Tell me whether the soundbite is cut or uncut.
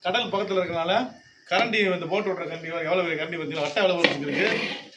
uncut